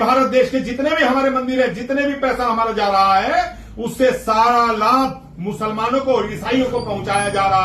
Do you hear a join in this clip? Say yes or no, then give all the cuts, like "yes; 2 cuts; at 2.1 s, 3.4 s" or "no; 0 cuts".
no; 0 cuts